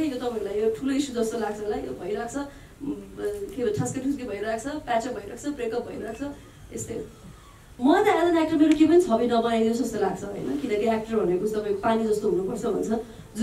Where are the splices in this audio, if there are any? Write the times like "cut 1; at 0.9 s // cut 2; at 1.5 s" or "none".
cut 1; at 7.8 s

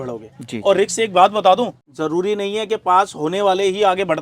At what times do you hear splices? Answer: cut 1; at 1.8 s

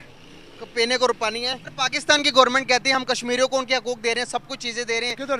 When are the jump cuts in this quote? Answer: cut 1; at 1.6 s

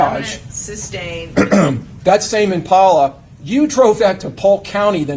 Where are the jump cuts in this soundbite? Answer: cut 1; at 1.9 s

